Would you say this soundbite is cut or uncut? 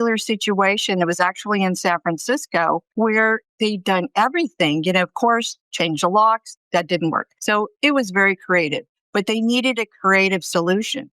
cut